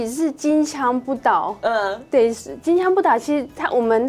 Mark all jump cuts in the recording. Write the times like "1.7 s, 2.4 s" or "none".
none